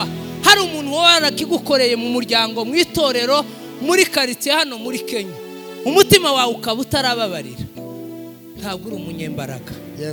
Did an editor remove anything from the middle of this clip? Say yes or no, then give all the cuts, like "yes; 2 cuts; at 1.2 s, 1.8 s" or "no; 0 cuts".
no; 0 cuts